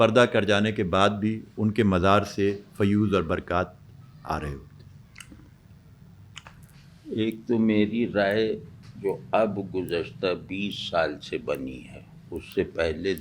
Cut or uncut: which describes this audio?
uncut